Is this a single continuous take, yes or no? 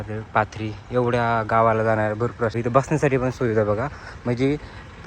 no